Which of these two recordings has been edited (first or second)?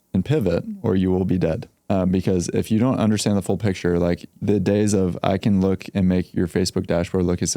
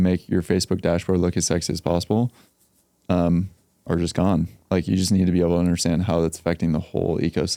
first